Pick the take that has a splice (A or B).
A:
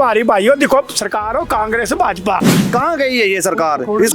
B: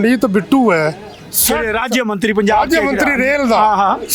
A